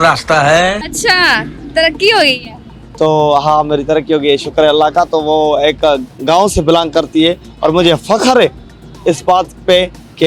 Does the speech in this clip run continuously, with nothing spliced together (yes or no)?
yes